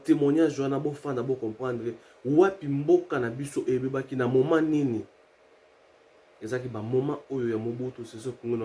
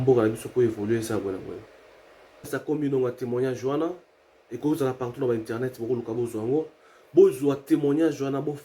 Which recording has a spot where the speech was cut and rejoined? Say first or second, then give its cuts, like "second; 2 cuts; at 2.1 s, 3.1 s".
second; 1 cut; at 2.5 s